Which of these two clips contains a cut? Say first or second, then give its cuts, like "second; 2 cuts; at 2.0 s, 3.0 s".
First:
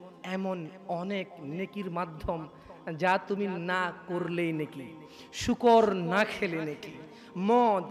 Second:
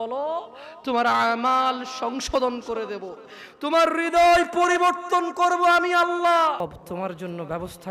second; 1 cut; at 6.6 s